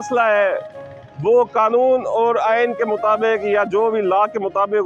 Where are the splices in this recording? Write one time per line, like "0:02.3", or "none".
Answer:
none

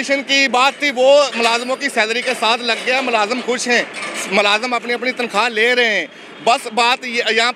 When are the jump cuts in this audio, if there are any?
none

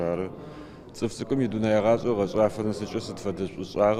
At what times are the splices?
none

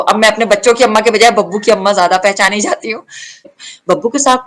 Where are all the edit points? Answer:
0:03.5

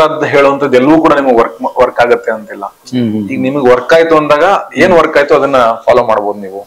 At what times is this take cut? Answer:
none

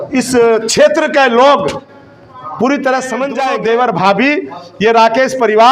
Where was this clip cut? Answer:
0:03.4

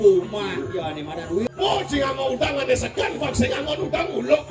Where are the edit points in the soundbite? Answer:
0:01.5

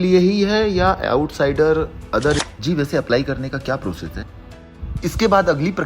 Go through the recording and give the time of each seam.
0:02.5
0:04.7

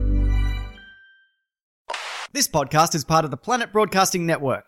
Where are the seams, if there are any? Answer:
0:01.8

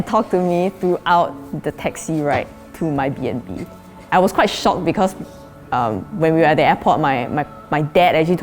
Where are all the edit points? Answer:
0:04.1

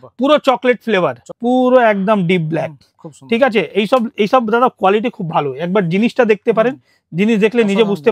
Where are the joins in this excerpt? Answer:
0:01.3

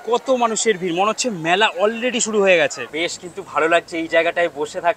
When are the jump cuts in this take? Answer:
0:02.8

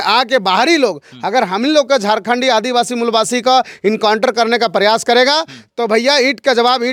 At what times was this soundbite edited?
none

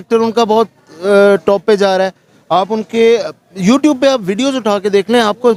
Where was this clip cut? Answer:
none

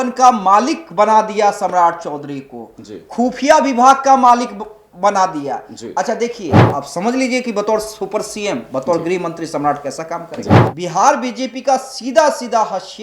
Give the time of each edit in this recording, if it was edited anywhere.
0:06.6
0:10.6

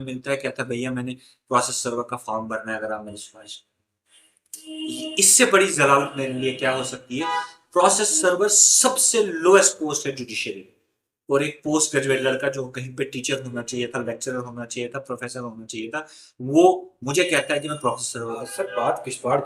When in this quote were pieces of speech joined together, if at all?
0:18.5

